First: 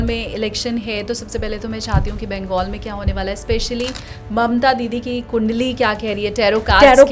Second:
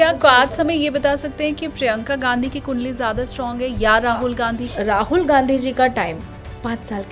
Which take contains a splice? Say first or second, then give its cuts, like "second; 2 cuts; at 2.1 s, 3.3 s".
second; 1 cut; at 4.6 s